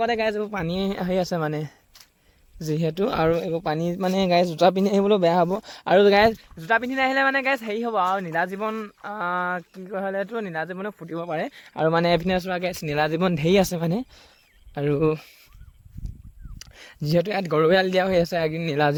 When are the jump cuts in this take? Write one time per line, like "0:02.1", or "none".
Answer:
none